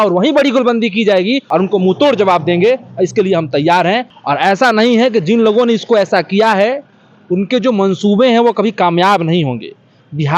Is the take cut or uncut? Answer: cut